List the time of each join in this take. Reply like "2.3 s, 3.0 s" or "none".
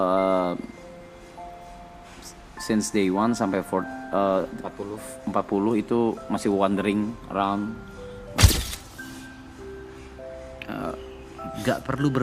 8.5 s